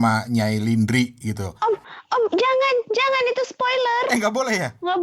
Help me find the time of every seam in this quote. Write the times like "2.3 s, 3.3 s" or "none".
1.5 s